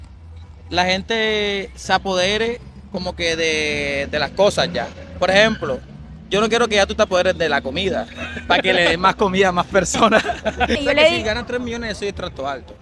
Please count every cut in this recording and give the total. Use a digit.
1